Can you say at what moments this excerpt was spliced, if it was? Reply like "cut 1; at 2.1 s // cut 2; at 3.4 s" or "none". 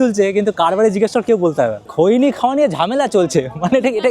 cut 1; at 1.8 s

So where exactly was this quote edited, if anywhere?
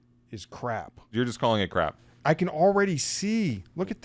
cut 1; at 1.0 s // cut 2; at 2.1 s

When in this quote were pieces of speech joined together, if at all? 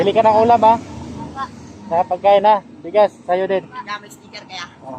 none

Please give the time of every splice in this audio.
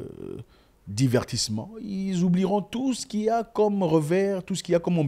none

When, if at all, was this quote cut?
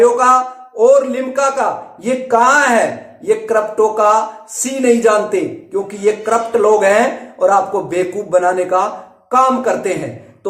none

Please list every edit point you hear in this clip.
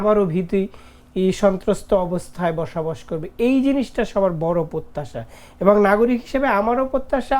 none

